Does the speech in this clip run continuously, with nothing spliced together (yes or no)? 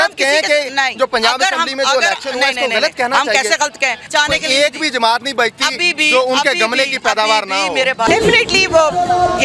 no